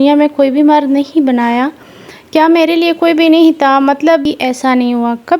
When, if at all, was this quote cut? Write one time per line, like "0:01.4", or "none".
0:04.2